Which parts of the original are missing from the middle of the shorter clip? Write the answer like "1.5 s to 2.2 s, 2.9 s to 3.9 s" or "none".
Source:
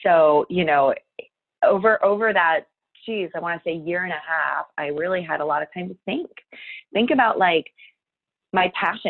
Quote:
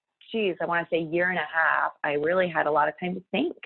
none